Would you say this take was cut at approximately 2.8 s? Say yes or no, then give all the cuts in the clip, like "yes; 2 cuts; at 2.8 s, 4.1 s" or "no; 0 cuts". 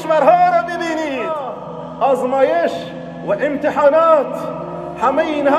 no; 1 cut; at 1.6 s